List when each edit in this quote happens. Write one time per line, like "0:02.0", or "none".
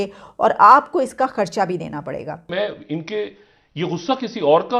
0:02.5